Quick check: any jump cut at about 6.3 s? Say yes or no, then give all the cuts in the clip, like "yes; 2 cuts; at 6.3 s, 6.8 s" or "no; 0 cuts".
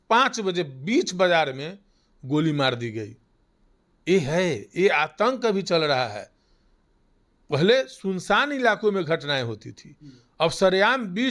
no; 0 cuts